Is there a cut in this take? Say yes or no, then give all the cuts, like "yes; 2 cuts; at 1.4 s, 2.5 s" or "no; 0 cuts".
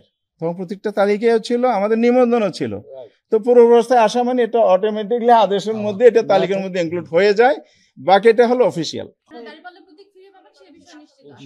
yes; 1 cut; at 9.2 s